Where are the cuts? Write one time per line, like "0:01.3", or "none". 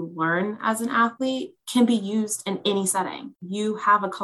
0:03.3